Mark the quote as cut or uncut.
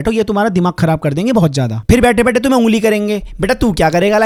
uncut